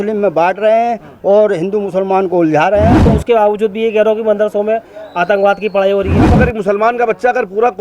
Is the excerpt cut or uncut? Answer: cut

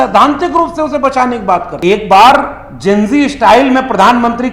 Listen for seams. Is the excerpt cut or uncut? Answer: cut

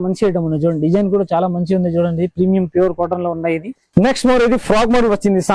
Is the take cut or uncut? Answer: cut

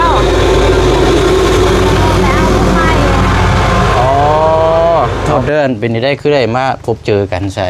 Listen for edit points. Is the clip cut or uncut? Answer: cut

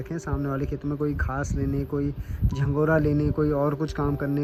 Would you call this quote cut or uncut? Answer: uncut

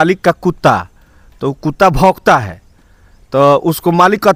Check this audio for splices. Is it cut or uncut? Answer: uncut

